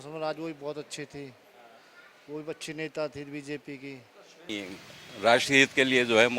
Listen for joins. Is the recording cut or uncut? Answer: cut